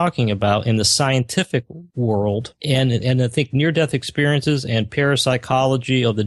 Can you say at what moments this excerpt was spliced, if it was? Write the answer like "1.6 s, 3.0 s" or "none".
1.8 s, 2.5 s